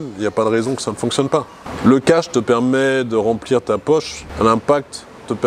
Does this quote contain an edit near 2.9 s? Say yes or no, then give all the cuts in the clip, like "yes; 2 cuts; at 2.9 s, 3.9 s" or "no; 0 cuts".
no; 2 cuts; at 1.6 s, 4.2 s